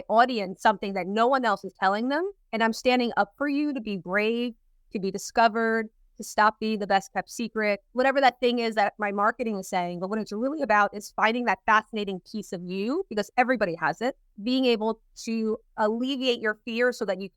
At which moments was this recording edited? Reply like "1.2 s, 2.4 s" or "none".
2.4 s, 7.9 s, 14.3 s

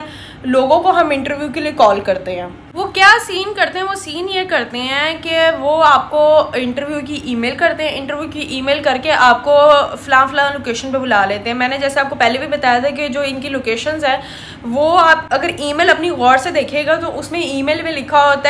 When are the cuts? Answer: none

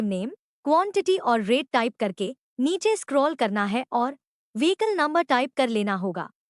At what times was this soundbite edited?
3.9 s

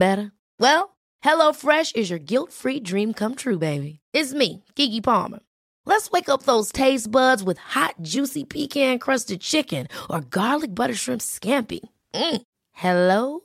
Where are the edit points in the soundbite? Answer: none

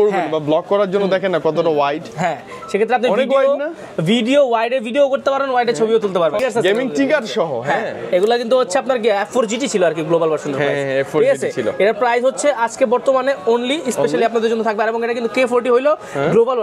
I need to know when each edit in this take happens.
6.4 s

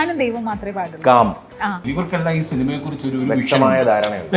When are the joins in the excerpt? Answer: 1.8 s

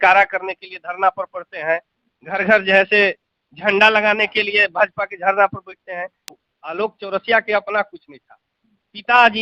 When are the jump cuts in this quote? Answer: 6.4 s

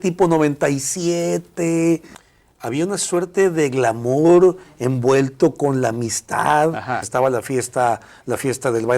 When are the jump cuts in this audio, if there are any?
2.1 s, 7.1 s

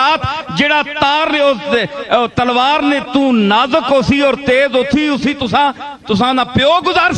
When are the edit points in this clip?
none

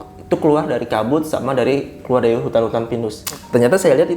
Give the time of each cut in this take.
3.2 s

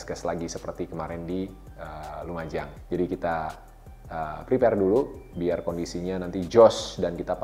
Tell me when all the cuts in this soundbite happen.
2.8 s

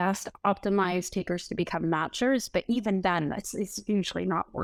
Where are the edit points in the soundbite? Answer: none

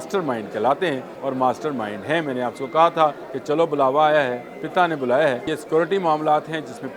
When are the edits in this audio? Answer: 1.1 s, 3.3 s, 5.5 s

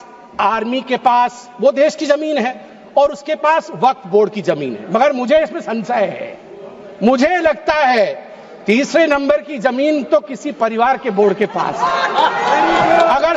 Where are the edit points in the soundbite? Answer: none

